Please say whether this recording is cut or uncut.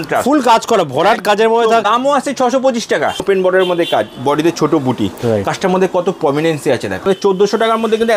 cut